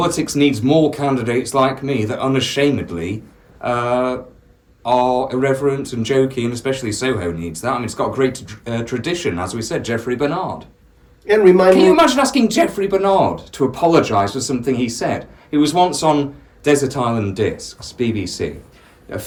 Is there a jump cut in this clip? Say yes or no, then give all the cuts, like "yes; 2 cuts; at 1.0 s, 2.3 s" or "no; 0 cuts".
no; 0 cuts